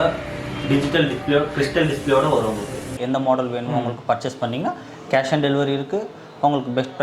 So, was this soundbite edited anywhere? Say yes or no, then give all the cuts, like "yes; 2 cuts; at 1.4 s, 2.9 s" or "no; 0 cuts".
yes; 1 cut; at 2.9 s